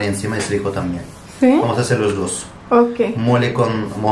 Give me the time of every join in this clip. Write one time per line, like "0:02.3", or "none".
none